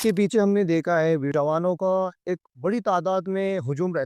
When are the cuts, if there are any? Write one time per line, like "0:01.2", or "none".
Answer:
0:01.3